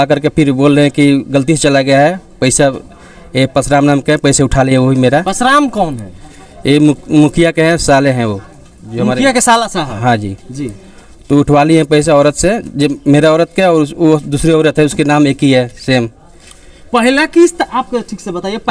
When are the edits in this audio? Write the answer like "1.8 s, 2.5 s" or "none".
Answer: none